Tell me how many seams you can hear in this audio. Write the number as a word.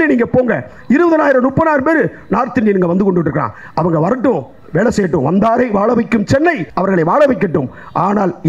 one